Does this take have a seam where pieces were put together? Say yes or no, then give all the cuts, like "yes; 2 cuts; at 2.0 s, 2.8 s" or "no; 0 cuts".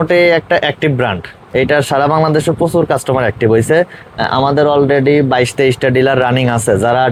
no; 0 cuts